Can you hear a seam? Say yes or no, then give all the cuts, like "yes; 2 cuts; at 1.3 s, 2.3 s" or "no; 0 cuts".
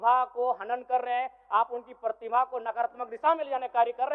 no; 0 cuts